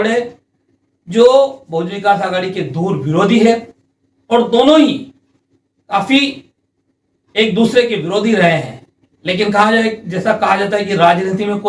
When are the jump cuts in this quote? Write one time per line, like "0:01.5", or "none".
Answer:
none